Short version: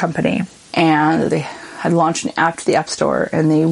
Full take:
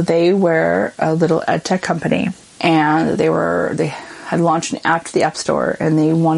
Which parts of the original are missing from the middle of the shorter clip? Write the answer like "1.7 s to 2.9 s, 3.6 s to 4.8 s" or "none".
3.2 s to 3.8 s